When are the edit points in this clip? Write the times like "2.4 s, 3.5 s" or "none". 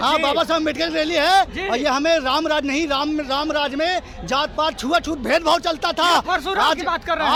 none